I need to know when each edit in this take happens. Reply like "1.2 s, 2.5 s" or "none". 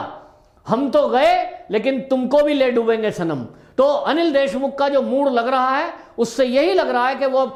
none